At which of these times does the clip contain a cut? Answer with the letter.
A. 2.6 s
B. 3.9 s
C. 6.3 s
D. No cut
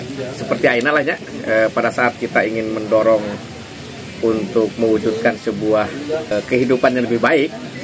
C